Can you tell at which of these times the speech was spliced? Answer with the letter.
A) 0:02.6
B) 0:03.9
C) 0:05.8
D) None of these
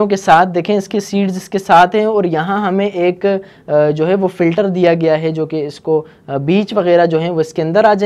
D